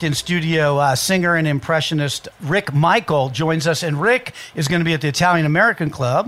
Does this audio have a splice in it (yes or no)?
yes